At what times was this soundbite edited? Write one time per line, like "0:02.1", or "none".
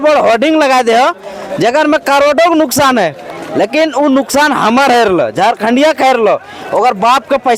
none